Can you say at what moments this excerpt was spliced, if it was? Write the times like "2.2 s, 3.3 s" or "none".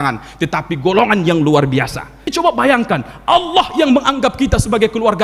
2.3 s